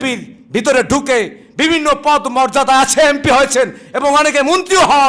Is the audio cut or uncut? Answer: uncut